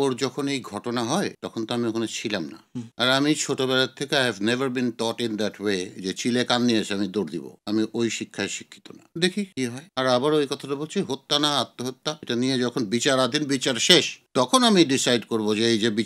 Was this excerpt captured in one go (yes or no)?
no